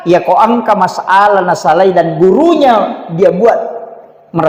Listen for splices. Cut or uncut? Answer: uncut